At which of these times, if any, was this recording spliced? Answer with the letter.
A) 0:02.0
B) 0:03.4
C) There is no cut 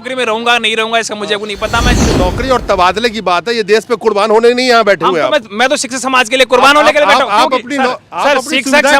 A